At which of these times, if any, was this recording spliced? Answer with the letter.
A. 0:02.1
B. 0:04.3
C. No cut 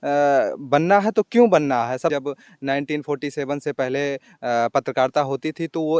A